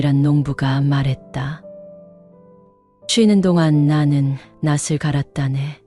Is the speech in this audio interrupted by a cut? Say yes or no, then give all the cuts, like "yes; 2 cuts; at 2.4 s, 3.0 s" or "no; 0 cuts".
no; 0 cuts